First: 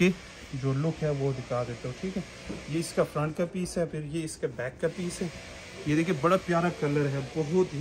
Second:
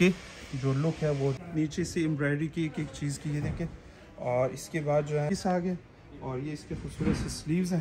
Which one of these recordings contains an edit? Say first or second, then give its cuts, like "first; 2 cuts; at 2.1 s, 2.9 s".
second; 2 cuts; at 1.4 s, 5.3 s